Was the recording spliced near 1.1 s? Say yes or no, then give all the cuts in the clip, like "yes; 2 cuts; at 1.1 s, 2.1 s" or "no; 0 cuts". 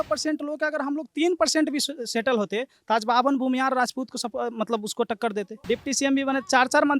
no; 1 cut; at 5.5 s